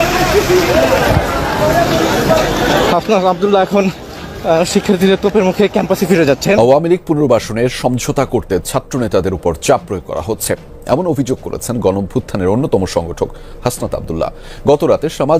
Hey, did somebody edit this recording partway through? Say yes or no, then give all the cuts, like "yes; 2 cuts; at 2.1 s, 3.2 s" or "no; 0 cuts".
yes; 1 cut; at 6.6 s